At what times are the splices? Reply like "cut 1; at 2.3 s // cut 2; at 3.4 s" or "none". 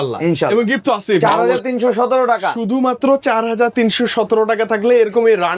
cut 1; at 1.2 s